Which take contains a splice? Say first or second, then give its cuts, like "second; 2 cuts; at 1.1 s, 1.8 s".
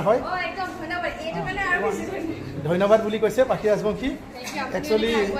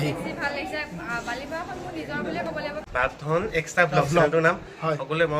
second; 1 cut; at 2.8 s